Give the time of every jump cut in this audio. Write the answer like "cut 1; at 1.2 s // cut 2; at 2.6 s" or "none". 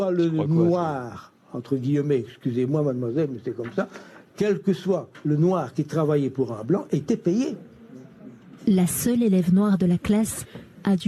none